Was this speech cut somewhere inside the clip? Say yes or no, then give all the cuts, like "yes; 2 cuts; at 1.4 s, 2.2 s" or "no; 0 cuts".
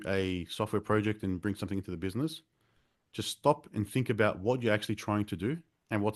no; 0 cuts